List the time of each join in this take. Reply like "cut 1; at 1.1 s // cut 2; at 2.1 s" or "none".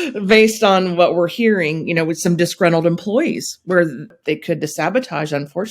cut 1; at 4.1 s